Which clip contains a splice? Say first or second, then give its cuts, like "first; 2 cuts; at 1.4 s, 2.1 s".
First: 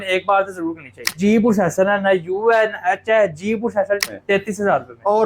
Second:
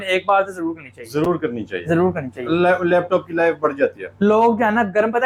first; 2 cuts; at 1.2 s, 4.0 s